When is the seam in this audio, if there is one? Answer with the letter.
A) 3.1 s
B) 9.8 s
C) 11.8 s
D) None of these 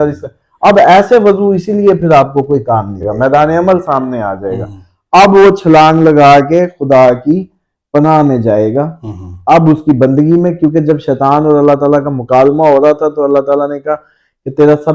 A